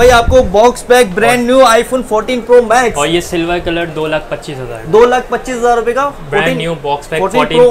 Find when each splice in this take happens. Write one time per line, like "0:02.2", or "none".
none